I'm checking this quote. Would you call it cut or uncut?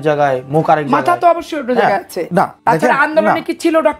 cut